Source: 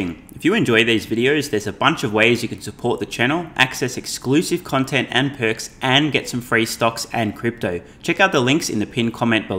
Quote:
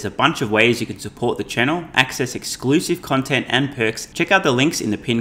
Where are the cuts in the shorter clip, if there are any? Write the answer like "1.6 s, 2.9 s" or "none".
4.0 s